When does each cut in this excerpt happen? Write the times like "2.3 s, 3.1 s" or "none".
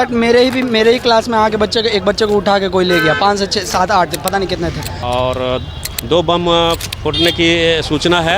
4.9 s